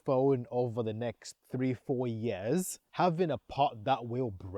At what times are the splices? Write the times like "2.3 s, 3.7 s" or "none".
2.8 s